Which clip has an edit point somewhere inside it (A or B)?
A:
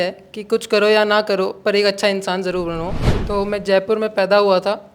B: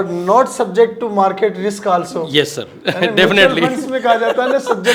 A